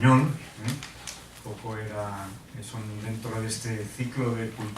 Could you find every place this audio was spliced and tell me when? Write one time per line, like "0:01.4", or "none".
0:02.1